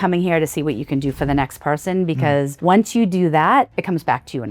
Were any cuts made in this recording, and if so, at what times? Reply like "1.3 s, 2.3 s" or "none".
2.5 s, 3.7 s